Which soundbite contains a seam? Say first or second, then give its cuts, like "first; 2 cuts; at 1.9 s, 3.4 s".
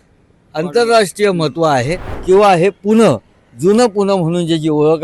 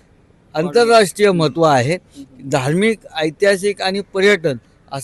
first; 1 cut; at 2.1 s